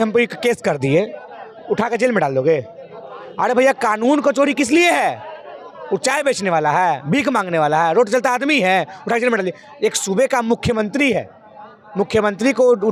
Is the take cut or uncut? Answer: uncut